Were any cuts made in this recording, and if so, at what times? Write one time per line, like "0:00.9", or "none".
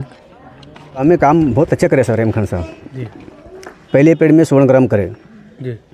0:01.0